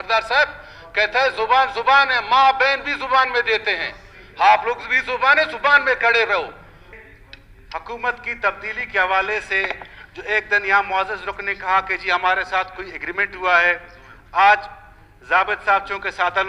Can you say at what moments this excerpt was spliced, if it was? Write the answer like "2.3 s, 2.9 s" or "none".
6.9 s

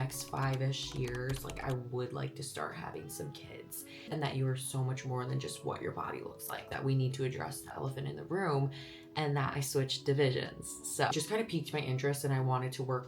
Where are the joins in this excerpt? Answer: 4.1 s, 6.7 s, 11.1 s

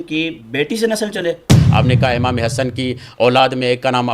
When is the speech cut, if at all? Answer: 1.6 s

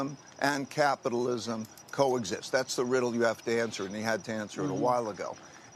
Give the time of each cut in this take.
none

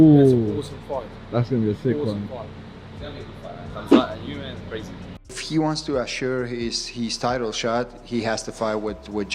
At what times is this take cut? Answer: 5.1 s

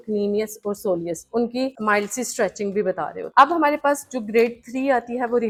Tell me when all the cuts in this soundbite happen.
none

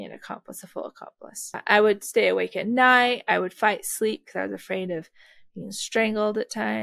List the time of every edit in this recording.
1.6 s

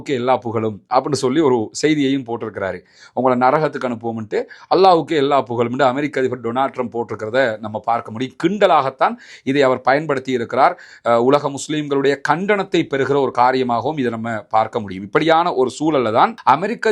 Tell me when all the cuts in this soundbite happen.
none

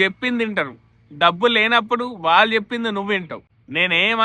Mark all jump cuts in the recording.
none

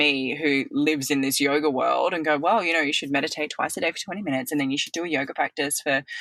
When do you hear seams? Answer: none

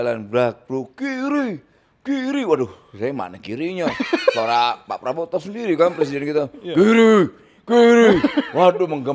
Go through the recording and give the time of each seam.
none

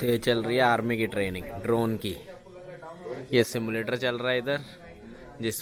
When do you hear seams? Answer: none

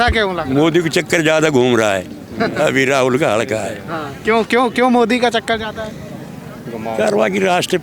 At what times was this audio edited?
none

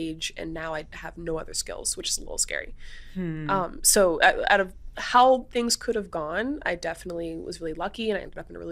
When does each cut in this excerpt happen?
none

